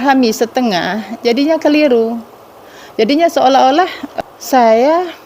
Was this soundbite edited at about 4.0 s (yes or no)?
yes